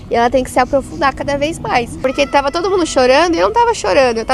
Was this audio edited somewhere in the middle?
yes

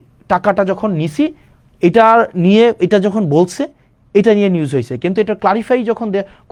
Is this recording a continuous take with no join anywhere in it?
yes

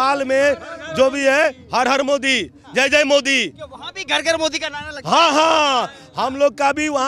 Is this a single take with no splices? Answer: yes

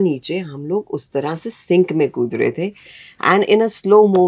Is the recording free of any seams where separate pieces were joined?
yes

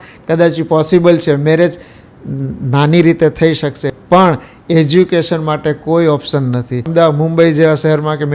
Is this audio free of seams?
no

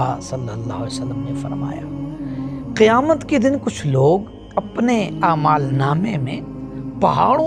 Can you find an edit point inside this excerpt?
no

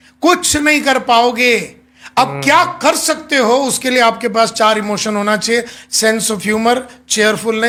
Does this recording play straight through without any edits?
yes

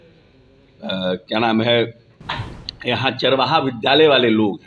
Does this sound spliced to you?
no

